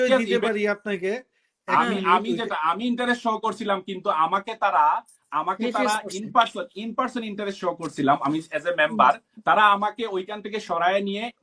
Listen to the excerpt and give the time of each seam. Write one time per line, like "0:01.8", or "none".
none